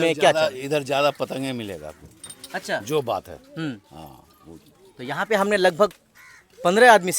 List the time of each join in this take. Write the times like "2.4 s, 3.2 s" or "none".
none